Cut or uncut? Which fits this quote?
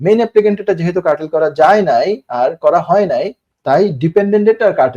uncut